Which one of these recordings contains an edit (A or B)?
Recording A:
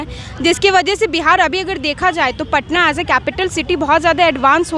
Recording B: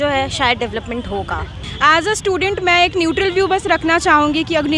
B